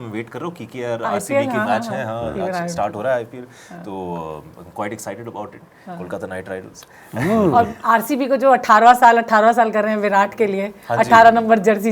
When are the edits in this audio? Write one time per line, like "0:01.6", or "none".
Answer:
none